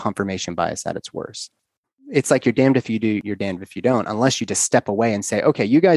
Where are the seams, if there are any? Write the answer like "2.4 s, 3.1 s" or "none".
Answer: 2.0 s, 3.3 s